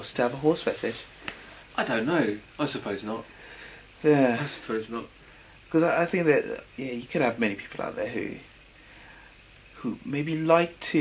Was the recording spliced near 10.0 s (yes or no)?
no